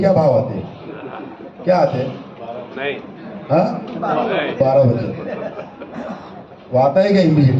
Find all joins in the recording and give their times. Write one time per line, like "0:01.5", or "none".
none